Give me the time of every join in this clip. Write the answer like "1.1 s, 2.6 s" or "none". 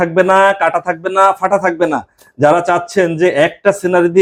none